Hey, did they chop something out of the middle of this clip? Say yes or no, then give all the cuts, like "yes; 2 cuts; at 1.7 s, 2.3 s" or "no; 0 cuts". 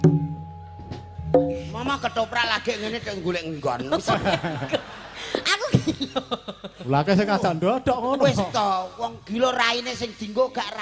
no; 0 cuts